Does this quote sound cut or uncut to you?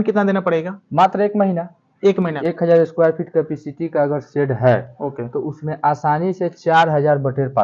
cut